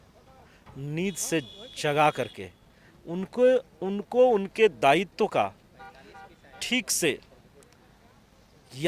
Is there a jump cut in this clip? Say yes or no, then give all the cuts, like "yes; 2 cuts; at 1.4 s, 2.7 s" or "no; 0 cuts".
no; 0 cuts